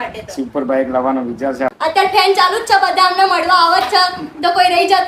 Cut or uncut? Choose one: cut